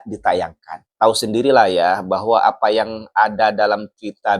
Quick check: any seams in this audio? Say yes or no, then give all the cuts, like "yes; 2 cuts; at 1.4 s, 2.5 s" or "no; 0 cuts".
yes; 1 cut; at 0.9 s